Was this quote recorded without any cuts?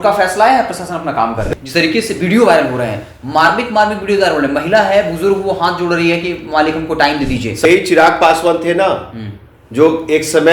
no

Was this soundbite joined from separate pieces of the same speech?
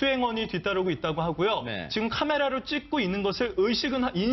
no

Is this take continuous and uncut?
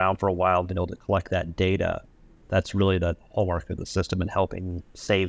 yes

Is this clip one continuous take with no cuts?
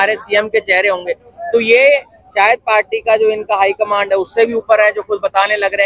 yes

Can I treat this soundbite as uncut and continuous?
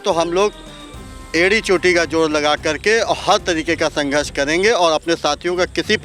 yes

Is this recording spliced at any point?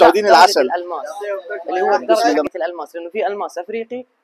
yes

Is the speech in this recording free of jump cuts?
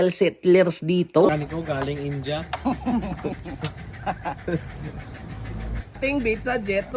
no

